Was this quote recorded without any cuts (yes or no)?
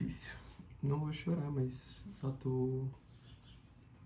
no